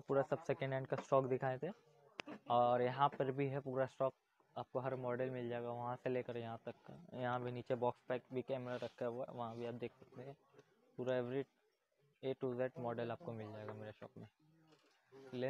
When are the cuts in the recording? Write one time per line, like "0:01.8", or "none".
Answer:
none